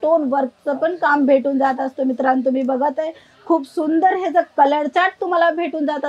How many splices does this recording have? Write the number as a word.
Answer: zero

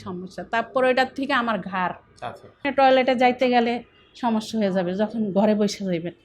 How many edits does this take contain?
one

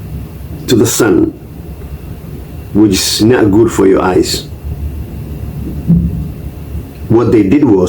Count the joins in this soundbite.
zero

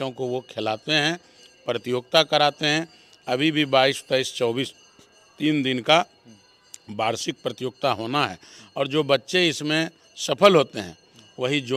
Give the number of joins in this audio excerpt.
zero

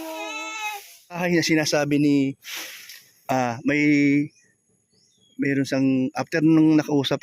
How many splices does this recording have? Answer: one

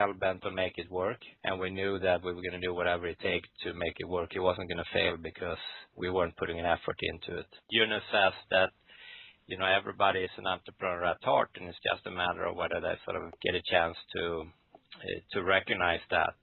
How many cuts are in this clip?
two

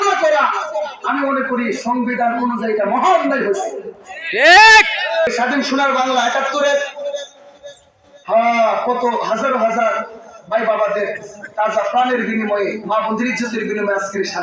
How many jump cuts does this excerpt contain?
one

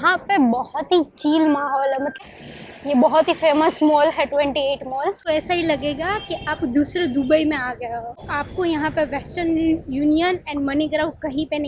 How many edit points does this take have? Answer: three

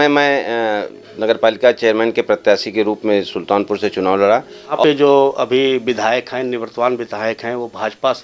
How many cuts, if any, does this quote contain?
one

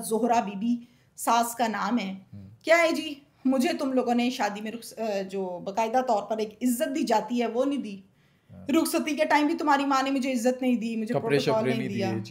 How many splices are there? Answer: zero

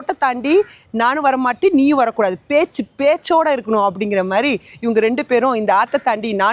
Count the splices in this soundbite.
zero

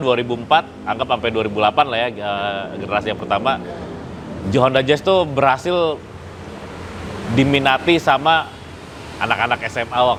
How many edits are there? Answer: zero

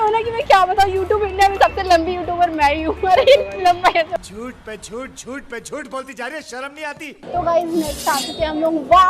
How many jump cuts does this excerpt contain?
zero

